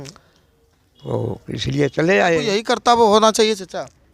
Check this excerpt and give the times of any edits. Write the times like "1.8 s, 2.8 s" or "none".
2.5 s